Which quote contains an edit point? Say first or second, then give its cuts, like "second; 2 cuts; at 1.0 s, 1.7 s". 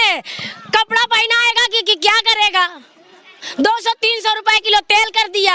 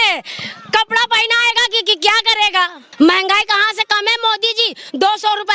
second; 1 cut; at 2.8 s